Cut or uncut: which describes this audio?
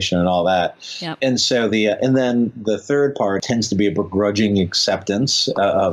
cut